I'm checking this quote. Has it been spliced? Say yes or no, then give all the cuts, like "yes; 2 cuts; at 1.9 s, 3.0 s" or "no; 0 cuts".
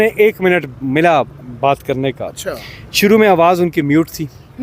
no; 0 cuts